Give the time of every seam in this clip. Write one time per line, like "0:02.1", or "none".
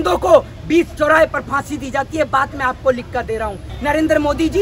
0:03.7